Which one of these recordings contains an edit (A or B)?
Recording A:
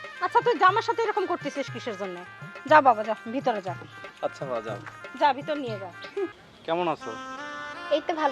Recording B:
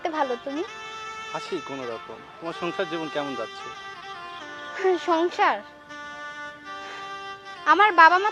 A